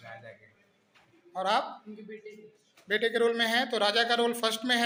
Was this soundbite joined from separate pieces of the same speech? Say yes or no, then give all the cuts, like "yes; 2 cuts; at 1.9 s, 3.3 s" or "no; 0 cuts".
no; 0 cuts